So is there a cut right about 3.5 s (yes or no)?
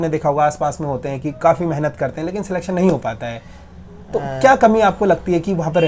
no